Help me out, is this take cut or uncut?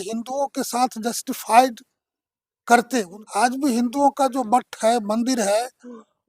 cut